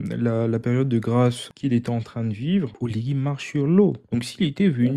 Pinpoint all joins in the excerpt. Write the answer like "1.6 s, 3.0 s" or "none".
1.5 s, 2.7 s, 4.0 s

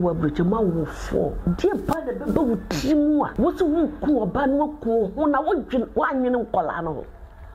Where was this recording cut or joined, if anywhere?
3.3 s

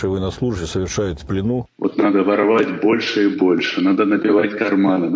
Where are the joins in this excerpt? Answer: 1.7 s

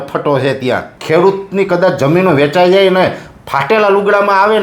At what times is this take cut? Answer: 0.9 s

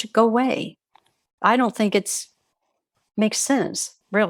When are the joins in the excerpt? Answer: 1.2 s

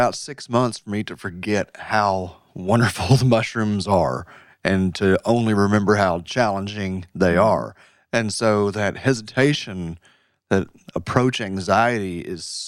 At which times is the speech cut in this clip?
none

